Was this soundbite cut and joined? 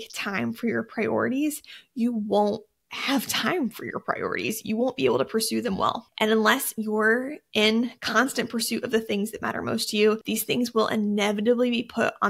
yes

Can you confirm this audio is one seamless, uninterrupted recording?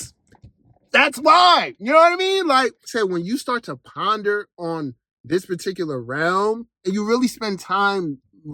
no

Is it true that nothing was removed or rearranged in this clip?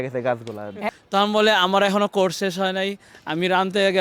no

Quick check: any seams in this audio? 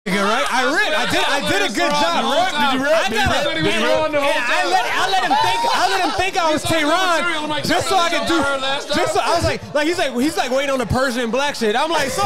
no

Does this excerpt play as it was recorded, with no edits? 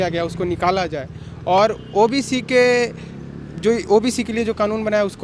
yes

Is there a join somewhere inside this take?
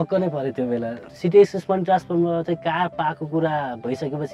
yes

